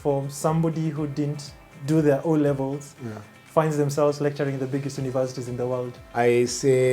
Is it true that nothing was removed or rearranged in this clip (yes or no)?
no